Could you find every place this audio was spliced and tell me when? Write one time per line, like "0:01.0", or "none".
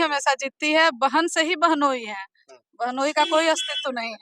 none